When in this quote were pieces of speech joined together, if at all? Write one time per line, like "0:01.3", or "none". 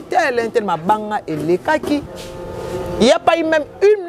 0:02.1